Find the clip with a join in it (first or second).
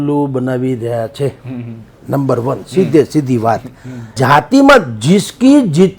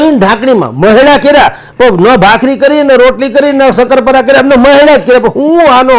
first